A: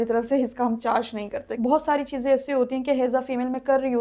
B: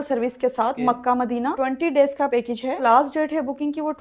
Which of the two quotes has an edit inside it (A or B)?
A